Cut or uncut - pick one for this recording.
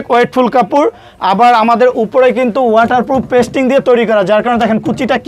uncut